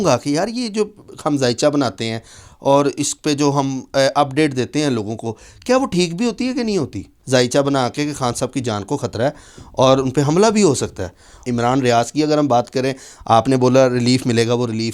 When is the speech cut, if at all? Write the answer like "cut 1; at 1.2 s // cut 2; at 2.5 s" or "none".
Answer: cut 1; at 7.1 s // cut 2; at 11.4 s